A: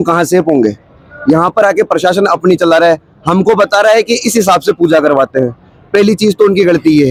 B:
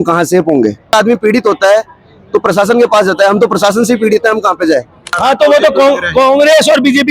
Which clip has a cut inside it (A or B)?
B